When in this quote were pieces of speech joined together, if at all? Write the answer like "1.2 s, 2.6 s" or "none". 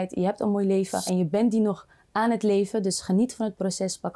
none

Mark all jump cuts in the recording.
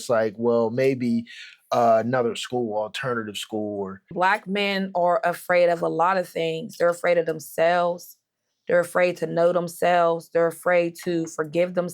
4.1 s

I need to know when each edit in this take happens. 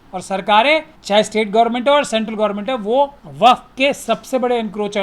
0.9 s, 3.2 s

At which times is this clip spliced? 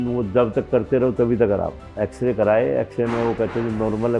1.8 s

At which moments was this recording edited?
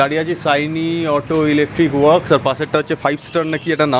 none

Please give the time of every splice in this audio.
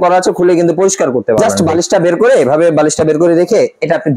1.5 s

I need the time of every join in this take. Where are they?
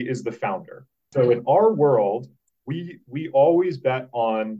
1.1 s

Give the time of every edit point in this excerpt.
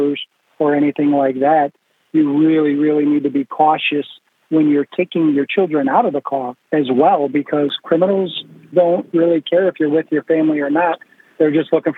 8.7 s

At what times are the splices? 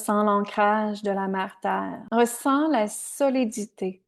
2.0 s

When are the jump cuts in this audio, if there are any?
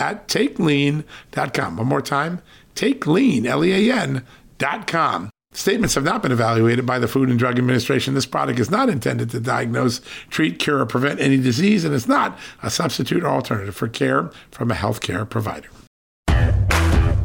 16.2 s

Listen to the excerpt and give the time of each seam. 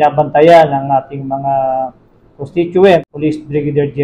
3.1 s

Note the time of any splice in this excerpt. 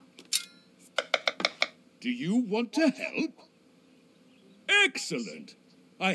1.9 s

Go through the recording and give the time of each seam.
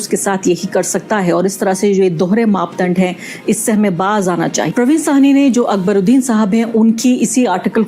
4.7 s

